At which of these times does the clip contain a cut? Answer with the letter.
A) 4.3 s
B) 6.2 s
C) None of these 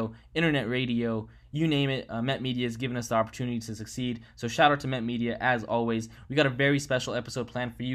C